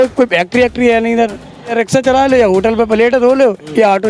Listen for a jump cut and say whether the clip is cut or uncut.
cut